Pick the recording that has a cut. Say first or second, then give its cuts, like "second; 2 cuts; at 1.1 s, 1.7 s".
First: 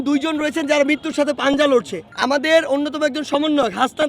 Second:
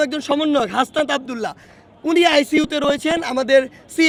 first; 1 cut; at 2.0 s